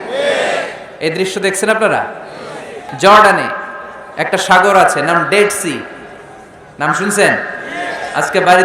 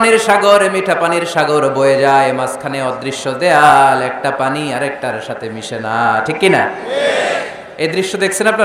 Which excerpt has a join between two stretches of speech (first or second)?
first